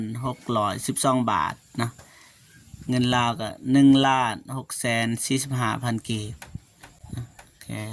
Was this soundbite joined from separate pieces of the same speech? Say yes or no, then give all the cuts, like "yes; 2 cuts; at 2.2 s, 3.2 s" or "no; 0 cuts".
no; 0 cuts